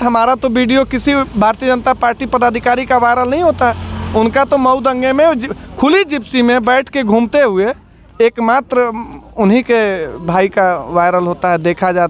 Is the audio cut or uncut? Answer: uncut